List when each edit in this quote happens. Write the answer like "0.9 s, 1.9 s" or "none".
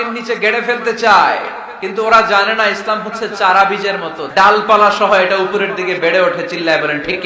4.2 s